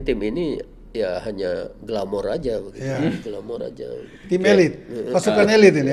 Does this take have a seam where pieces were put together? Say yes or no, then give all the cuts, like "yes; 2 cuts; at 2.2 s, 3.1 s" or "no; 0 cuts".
no; 0 cuts